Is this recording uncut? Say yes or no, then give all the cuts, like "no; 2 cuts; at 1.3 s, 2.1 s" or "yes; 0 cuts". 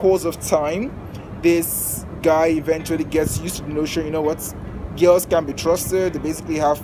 yes; 0 cuts